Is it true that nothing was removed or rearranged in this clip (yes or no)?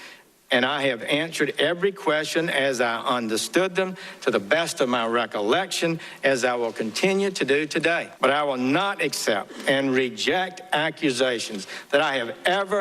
no